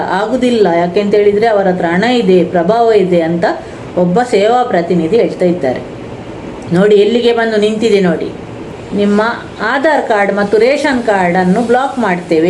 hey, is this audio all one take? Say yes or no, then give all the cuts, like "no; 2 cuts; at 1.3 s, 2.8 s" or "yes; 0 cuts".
no; 1 cut; at 8.6 s